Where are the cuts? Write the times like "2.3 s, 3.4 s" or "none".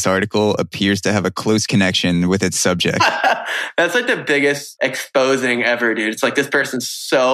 4.7 s